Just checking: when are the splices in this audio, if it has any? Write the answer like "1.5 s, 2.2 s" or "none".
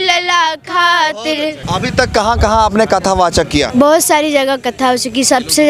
1.6 s, 3.7 s